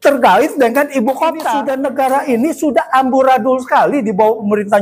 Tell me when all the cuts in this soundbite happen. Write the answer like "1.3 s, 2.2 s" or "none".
1.7 s